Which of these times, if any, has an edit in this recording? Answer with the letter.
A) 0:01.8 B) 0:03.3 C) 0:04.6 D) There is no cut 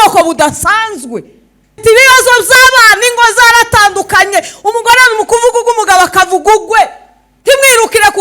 A